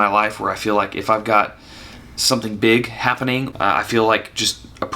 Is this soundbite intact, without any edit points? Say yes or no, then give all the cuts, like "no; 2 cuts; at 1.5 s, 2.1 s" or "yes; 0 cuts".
no; 1 cut; at 3.5 s